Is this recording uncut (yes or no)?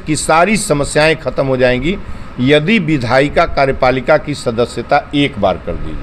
yes